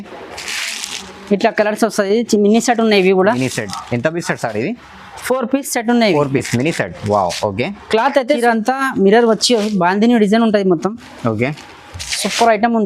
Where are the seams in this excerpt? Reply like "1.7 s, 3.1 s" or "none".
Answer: 8.4 s